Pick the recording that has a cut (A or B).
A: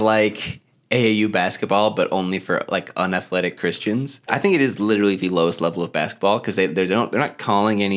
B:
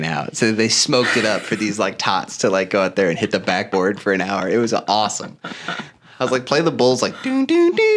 A